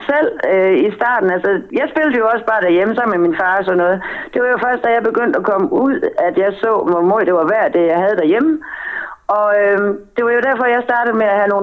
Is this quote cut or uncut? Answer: cut